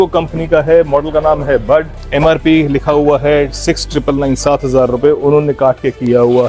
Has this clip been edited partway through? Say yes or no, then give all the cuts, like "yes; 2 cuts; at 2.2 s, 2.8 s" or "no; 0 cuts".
yes; 1 cut; at 2.0 s